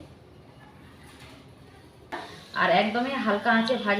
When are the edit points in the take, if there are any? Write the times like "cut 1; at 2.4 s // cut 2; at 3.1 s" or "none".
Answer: cut 1; at 2.2 s

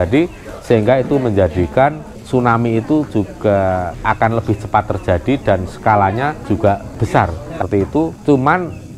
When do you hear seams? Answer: cut 1; at 7.6 s

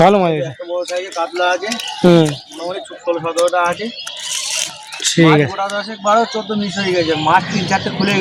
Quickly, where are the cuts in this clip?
none

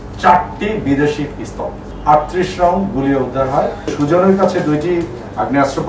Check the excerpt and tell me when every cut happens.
cut 1; at 1.9 s // cut 2; at 3.9 s

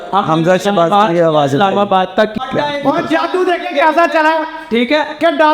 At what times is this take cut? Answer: cut 1; at 2.4 s

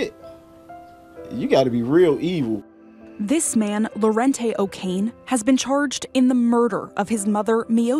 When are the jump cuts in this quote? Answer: cut 1; at 2.7 s

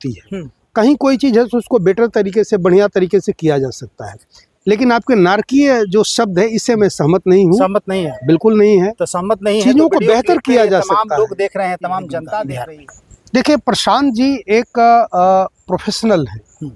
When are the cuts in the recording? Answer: cut 1; at 12.6 s

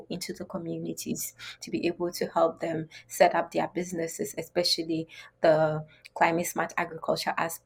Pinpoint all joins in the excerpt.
none

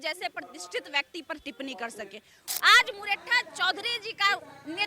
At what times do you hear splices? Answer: cut 1; at 2.4 s

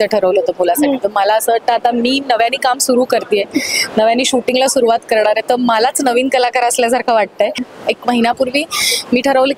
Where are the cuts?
cut 1; at 7.7 s

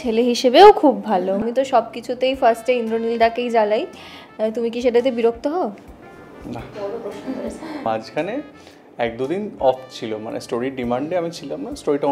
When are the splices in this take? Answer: cut 1; at 1.4 s // cut 2; at 7.8 s

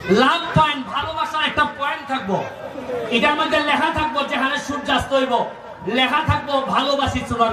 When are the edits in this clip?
none

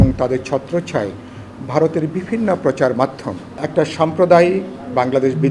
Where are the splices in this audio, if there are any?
cut 1; at 3.6 s

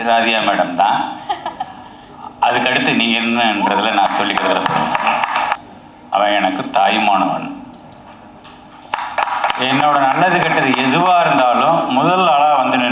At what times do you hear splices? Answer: cut 1; at 5.6 s

